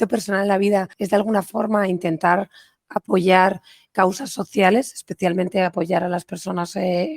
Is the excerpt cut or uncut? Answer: cut